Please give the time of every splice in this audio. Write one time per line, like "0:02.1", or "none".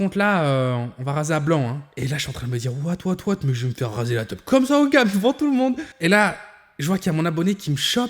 0:02.0
0:05.9